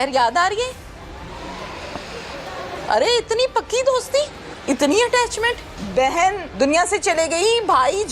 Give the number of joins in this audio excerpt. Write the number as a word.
four